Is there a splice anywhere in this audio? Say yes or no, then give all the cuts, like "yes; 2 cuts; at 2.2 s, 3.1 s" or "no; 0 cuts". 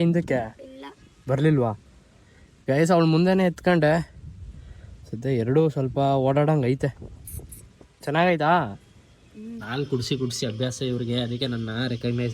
yes; 1 cut; at 9.6 s